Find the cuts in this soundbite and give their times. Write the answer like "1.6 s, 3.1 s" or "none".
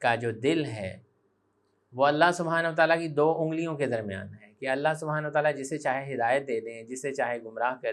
none